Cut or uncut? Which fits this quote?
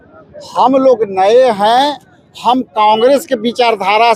uncut